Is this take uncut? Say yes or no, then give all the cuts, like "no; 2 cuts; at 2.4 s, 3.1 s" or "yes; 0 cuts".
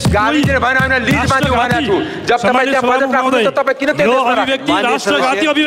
yes; 0 cuts